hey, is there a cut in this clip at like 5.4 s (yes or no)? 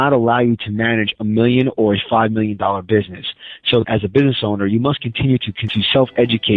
no